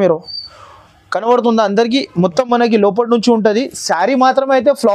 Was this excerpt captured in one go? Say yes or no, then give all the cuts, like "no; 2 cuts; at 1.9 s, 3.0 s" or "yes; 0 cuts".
yes; 0 cuts